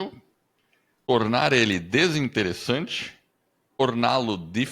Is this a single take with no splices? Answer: no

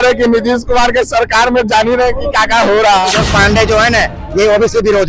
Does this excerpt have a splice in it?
yes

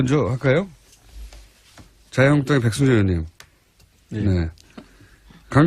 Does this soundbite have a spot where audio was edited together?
yes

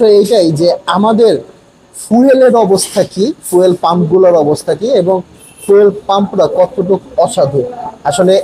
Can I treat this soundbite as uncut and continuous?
yes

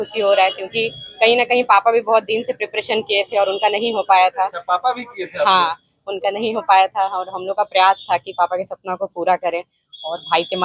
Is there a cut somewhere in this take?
no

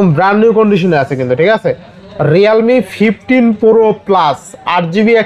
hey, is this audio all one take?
yes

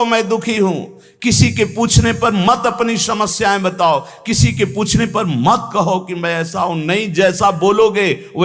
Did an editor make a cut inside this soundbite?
no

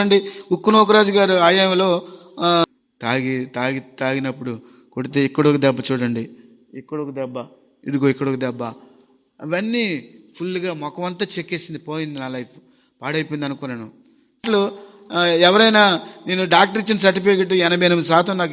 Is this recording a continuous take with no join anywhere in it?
no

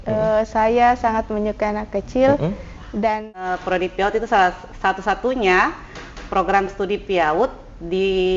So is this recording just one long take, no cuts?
no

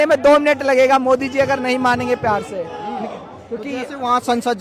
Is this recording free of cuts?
yes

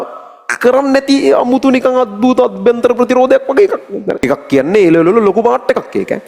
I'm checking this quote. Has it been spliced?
yes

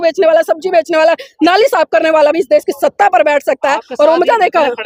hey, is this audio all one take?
yes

